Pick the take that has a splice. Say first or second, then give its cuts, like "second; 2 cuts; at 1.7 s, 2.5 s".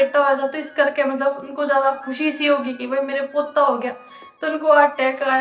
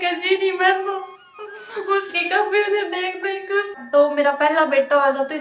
second; 1 cut; at 3.8 s